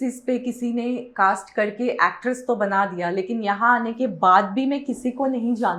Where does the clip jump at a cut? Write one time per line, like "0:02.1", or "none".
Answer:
none